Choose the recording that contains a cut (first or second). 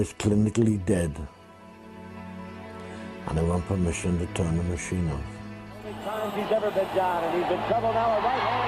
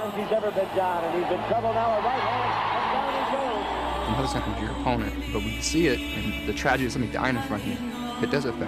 first